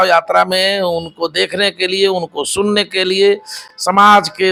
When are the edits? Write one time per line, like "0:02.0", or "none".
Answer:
none